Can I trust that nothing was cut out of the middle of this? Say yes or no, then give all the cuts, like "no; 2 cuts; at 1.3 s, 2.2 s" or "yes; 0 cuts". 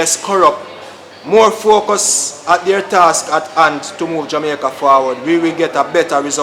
yes; 0 cuts